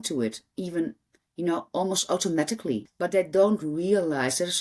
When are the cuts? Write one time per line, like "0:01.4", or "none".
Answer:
0:02.8